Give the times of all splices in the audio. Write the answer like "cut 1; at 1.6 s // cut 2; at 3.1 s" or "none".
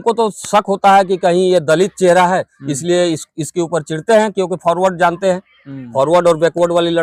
none

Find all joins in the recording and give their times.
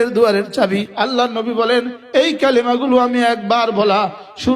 cut 1; at 0.9 s

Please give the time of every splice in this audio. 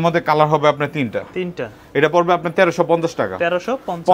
none

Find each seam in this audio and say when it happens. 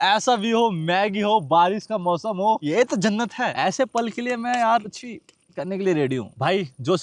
none

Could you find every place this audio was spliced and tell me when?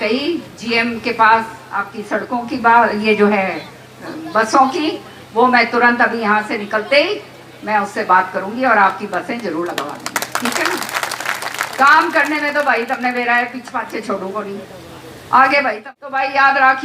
cut 1; at 15.8 s

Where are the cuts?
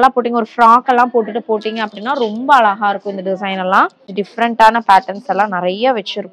cut 1; at 4.1 s

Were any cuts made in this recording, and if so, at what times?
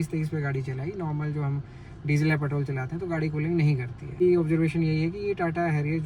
cut 1; at 4.2 s

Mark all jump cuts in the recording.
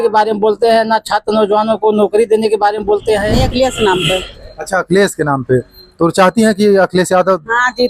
cut 1; at 3.3 s

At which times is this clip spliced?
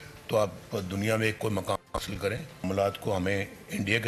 none

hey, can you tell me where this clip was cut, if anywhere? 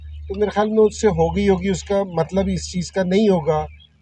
none

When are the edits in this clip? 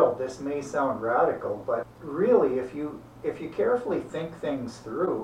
cut 1; at 2.0 s

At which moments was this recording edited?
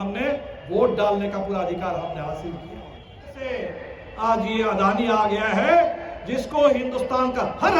cut 1; at 3.5 s

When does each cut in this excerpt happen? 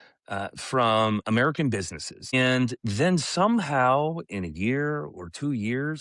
cut 1; at 2.3 s

